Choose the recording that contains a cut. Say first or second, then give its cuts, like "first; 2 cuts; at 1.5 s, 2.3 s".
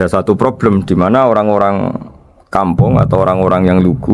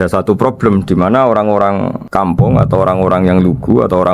second; 1 cut; at 2.0 s